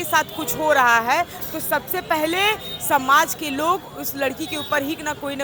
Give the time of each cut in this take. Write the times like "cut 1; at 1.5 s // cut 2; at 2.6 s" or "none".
none